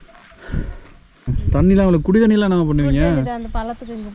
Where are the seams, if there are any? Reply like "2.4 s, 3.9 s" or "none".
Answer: 1.4 s

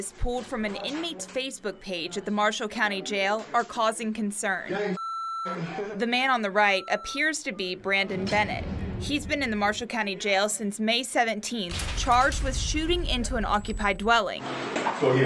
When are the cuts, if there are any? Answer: none

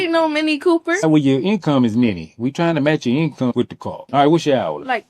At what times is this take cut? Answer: 1.1 s, 4.0 s

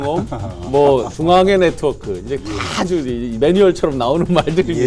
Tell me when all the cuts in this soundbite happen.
none

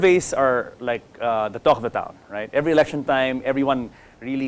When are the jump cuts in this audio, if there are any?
2.4 s

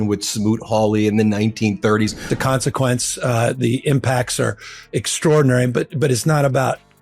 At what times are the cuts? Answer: 2.2 s

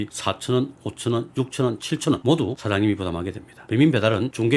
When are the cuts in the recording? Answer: none

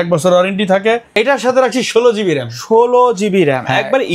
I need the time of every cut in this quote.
1.1 s

